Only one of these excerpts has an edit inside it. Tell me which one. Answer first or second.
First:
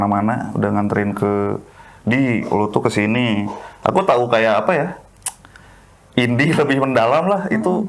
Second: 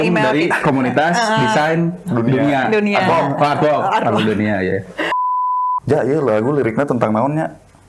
second